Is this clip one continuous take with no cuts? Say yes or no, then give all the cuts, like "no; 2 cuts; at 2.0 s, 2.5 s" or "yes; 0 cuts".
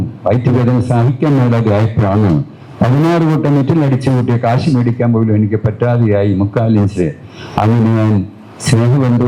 yes; 0 cuts